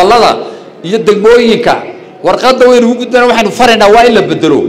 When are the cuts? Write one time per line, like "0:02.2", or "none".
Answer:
none